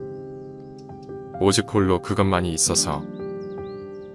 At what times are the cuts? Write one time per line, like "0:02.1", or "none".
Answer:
0:03.2